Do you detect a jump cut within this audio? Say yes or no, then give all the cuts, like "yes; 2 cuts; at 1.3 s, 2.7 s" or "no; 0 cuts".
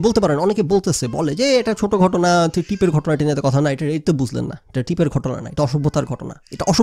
no; 0 cuts